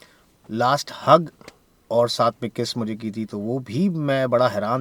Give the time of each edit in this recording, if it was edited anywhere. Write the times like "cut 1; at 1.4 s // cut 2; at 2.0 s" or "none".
none